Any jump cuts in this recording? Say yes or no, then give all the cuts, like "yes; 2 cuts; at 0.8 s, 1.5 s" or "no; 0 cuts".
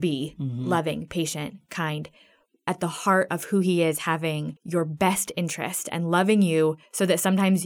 yes; 2 cuts; at 2.7 s, 4.5 s